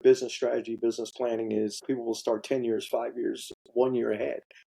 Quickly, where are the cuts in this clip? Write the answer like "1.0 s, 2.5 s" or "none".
1.8 s